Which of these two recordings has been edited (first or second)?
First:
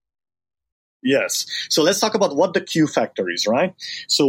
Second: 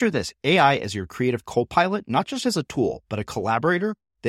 first